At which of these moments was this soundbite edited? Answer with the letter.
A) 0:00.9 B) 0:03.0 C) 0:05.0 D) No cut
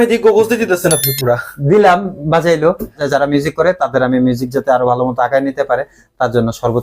B